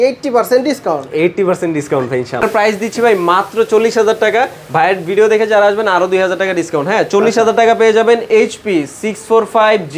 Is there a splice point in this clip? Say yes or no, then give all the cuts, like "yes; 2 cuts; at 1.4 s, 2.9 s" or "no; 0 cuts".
no; 0 cuts